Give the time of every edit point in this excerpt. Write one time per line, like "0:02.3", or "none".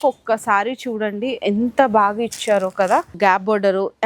0:03.1